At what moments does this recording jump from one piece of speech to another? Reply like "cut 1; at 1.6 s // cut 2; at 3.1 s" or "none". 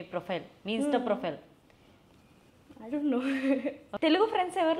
cut 1; at 3.8 s